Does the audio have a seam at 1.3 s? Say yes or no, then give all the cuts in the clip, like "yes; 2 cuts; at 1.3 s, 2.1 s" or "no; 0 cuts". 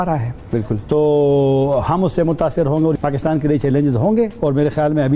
no; 1 cut; at 2.9 s